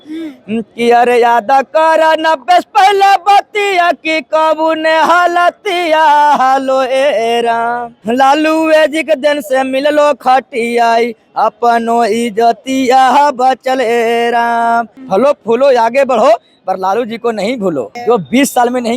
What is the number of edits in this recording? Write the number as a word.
three